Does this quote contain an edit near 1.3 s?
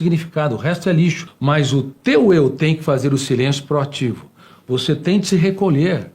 yes; 1 cut; at 1.3 s

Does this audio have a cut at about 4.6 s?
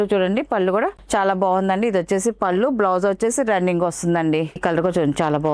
yes; 1 cut; at 4.6 s

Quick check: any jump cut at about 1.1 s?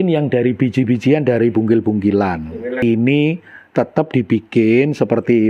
no; 1 cut; at 2.8 s

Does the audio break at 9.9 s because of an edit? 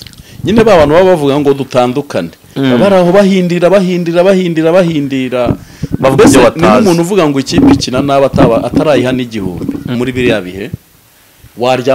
yes; 1 cut; at 9.9 s

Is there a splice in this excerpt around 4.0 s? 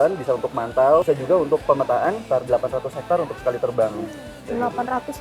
no; 2 cuts; at 1.0 s, 2.2 s

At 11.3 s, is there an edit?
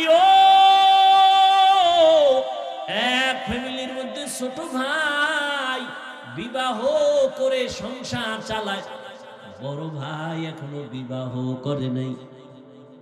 no; 1 cut; at 2.9 s

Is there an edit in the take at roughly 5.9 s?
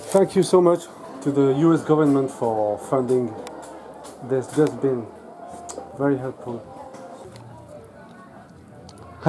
no; 1 cut; at 7.2 s

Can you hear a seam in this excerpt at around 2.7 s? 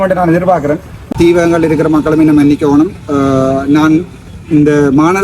no; 1 cut; at 1.1 s

